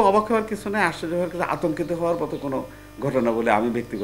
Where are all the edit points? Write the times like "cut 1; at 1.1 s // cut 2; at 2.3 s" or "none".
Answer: none